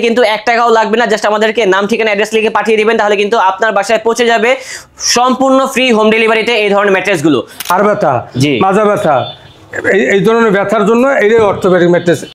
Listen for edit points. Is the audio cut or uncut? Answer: cut